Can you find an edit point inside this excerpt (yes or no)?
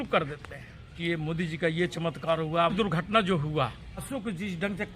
yes